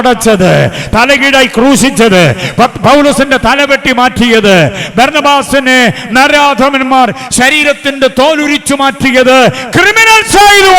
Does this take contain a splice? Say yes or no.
no